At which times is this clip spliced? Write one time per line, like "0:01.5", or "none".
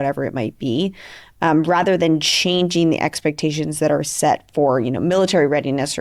none